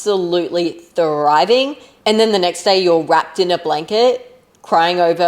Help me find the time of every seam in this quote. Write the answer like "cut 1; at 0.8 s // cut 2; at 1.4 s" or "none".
cut 1; at 1.8 s